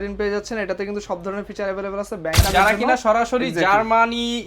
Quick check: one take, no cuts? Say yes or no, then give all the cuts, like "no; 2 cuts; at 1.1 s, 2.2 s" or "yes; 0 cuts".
no; 1 cut; at 2.4 s